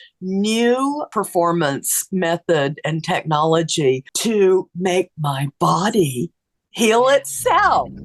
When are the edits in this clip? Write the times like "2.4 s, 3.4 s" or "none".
1.0 s, 4.1 s